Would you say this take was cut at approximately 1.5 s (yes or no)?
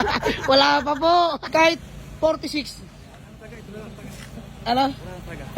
yes